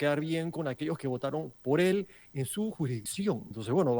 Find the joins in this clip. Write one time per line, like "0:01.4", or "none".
0:03.0